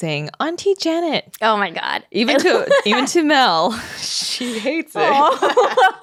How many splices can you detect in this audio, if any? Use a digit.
0